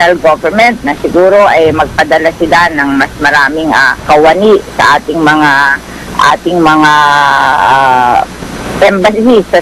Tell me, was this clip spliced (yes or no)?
no